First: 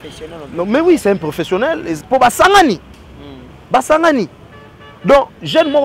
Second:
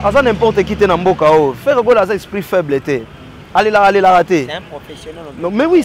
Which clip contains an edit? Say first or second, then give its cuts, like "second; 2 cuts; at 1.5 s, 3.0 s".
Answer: first; 1 cut; at 1.9 s